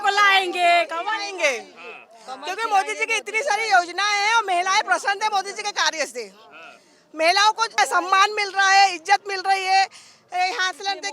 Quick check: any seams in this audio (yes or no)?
yes